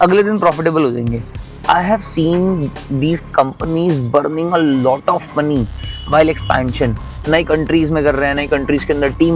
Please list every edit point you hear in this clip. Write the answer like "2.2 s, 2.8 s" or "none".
none